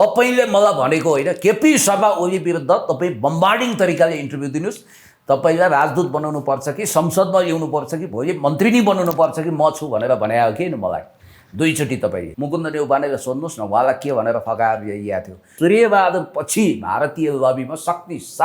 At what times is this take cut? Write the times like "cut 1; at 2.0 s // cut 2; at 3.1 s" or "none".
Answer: cut 1; at 12.3 s // cut 2; at 15.5 s